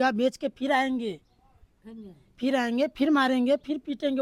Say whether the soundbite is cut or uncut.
uncut